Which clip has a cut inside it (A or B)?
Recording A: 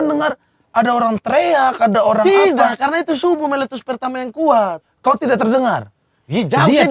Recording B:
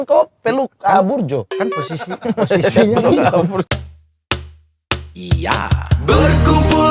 B